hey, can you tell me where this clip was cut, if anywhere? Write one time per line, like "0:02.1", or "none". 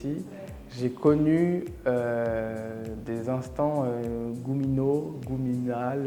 none